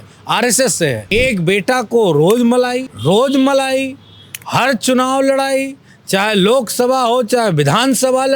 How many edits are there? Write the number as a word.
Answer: two